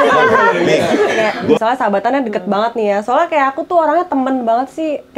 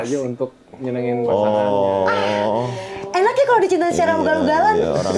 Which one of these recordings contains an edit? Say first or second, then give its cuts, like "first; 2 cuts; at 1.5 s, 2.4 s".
first; 1 cut; at 1.6 s